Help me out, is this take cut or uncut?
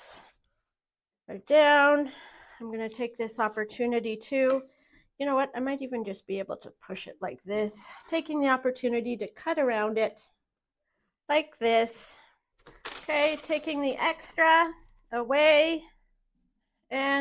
uncut